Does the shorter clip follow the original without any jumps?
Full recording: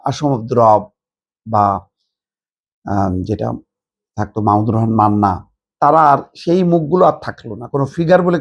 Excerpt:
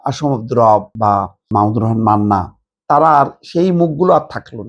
no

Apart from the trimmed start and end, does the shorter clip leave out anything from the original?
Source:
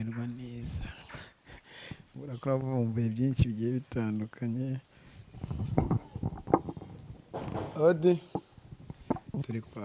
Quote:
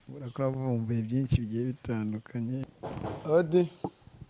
yes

